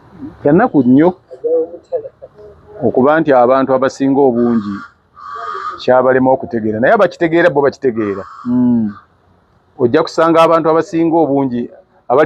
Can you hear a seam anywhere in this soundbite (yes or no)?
no